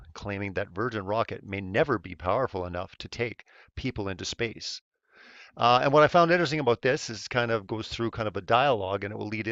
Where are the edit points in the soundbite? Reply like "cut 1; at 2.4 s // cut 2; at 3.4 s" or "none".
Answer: cut 1; at 7.2 s

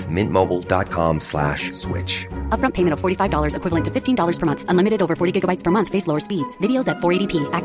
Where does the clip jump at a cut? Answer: none

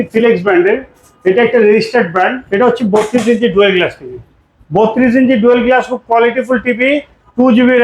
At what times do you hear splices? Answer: cut 1; at 2.4 s

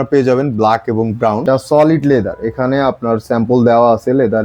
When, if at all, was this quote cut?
cut 1; at 1.4 s

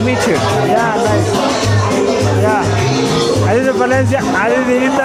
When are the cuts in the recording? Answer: none

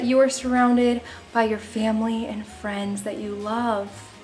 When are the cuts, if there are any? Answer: none

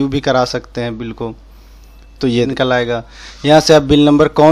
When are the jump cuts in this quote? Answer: cut 1; at 2.5 s

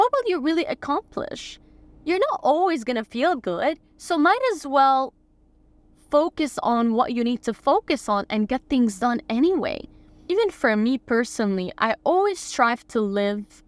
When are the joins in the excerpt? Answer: none

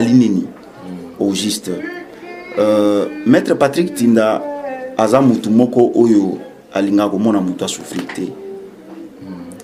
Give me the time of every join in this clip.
none

